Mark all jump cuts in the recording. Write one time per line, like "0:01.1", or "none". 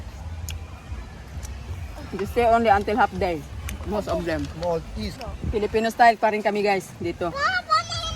0:05.2